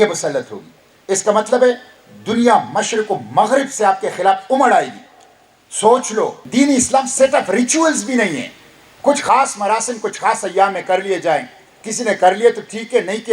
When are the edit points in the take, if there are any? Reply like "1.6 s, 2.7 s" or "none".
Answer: 6.4 s